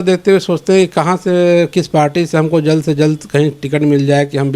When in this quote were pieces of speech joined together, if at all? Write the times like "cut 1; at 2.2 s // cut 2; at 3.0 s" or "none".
none